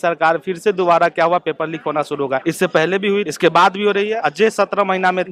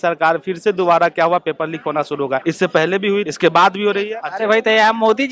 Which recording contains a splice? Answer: second; 1 cut; at 4.2 s

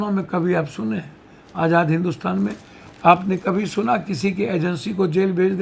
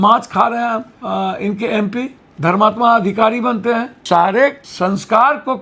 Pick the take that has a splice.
second; 4 cuts; at 0.9 s, 2.2 s, 3.9 s, 4.6 s

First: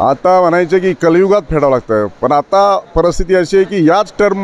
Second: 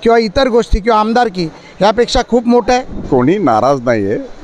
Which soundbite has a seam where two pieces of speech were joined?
second; 1 cut; at 3.0 s

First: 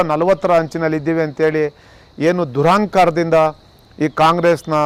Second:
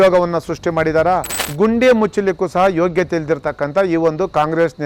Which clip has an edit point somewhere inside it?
second; 1 cut; at 1.4 s

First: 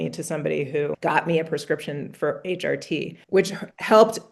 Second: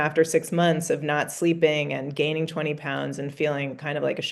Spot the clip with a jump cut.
first; 2 cuts; at 1.0 s, 3.1 s

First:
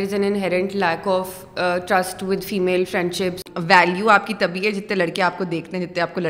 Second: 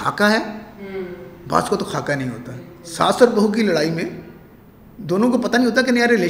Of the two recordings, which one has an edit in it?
first; 1 cut; at 3.4 s

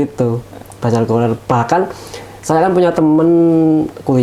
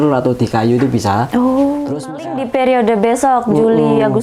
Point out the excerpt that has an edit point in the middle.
second; 1 cut; at 2.1 s

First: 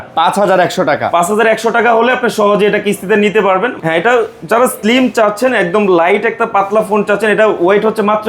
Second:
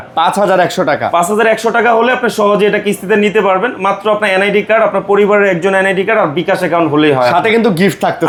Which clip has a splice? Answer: first; 1 cut; at 3.8 s

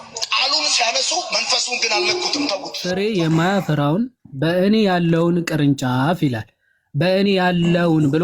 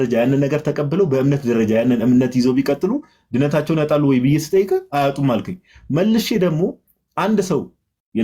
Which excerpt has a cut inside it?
first; 1 cut; at 2.8 s

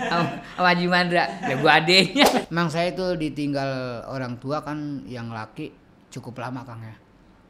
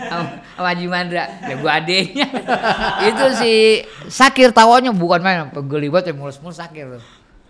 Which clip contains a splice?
first; 1 cut; at 2.4 s

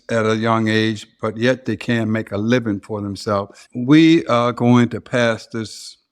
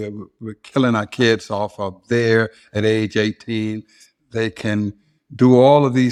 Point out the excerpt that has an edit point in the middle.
first; 1 cut; at 3.6 s

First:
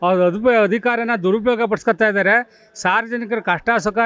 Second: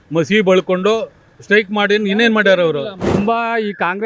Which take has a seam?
second; 1 cut; at 3.1 s

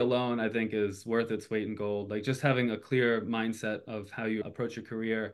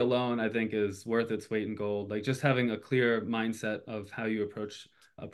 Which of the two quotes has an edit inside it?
first; 1 cut; at 4.4 s

